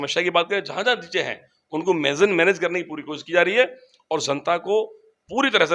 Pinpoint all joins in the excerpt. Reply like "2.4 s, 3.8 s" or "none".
none